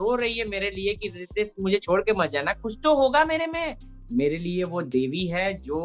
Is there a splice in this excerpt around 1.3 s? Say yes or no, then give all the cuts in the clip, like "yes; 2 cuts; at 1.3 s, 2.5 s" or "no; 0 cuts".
no; 1 cut; at 3.9 s